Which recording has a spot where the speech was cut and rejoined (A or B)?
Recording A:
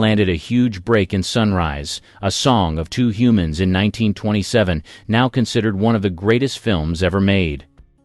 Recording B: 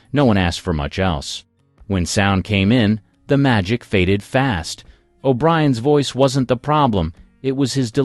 A